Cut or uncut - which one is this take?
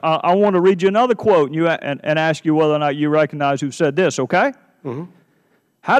uncut